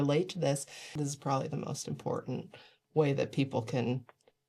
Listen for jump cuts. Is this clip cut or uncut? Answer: cut